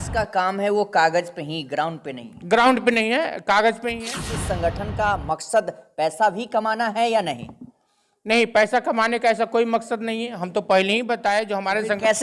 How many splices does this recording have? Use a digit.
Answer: 1